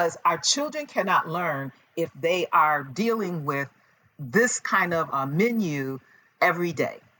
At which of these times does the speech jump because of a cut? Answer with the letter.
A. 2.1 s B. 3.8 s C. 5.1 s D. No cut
C